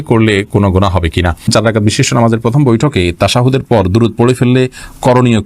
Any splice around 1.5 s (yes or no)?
yes